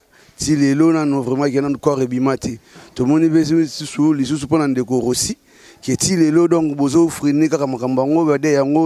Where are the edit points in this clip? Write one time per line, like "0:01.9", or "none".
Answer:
none

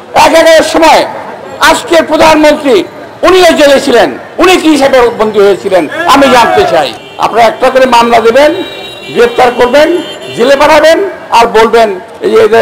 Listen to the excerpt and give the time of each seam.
0:07.0

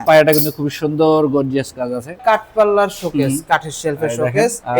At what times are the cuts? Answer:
0:02.2

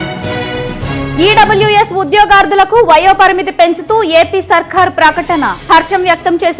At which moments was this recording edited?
0:01.0

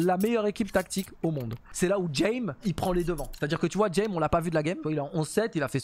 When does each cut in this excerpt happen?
0:01.6
0:02.6
0:04.8

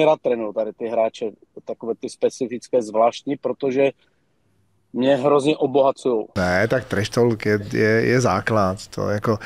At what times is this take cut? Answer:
0:06.4

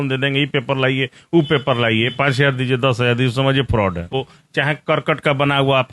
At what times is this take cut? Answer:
0:04.1

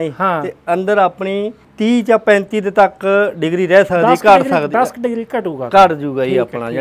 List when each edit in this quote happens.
0:01.6

